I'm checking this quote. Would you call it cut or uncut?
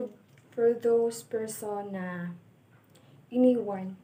uncut